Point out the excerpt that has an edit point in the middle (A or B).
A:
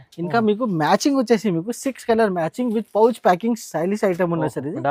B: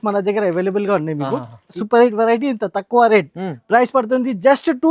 B